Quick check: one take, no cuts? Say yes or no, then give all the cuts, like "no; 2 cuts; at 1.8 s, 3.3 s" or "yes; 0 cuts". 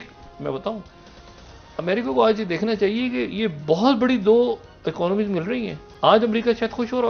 yes; 0 cuts